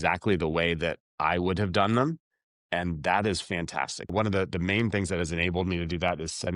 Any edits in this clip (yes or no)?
yes